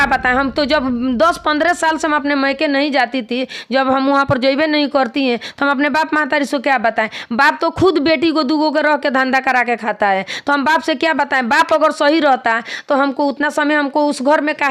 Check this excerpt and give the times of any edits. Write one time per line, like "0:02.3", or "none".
none